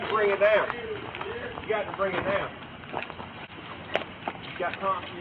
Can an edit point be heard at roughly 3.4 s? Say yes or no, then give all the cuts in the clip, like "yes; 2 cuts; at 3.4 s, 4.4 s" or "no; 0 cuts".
yes; 1 cut; at 3.4 s